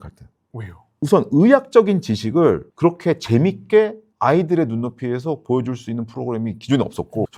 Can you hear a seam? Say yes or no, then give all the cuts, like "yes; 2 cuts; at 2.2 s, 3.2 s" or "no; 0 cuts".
no; 0 cuts